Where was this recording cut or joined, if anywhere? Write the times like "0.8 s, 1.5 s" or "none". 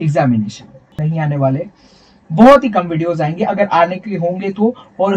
1.0 s